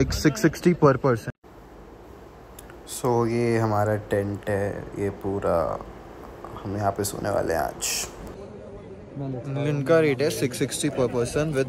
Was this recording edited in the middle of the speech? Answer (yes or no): no